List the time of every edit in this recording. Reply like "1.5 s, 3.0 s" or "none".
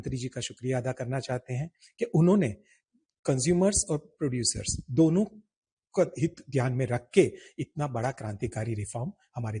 none

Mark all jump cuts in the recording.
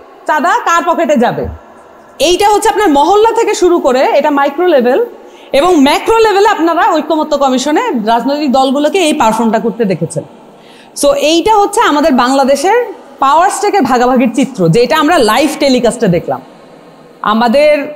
none

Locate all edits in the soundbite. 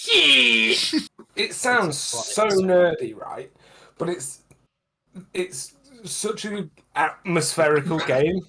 1.1 s

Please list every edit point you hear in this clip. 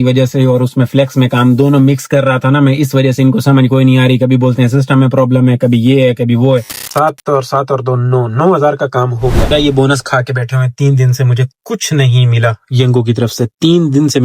6.8 s, 9.5 s

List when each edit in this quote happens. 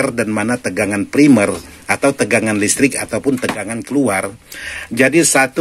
none

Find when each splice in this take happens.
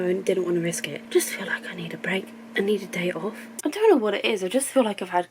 1.0 s, 3.5 s

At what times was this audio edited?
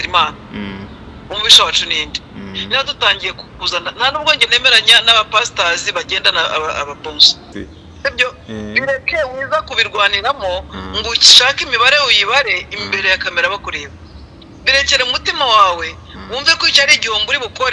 7.5 s

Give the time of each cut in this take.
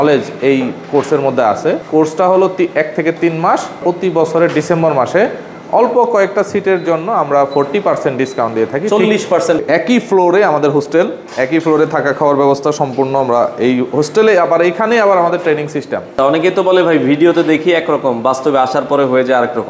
1.8 s, 3.8 s, 9.6 s, 16.1 s

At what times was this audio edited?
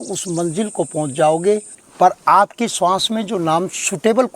1.8 s

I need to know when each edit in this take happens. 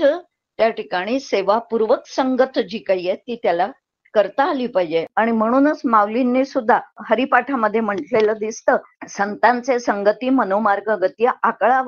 5.1 s, 7.0 s, 9.0 s

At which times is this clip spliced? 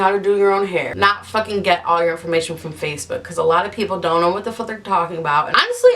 0.9 s

